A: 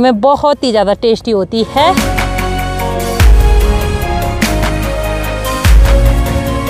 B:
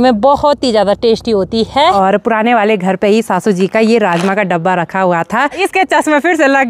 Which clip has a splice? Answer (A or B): B